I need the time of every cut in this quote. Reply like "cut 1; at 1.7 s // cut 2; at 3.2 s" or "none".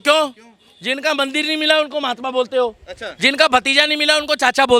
none